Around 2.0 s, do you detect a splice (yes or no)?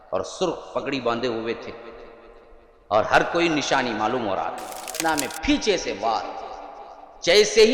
no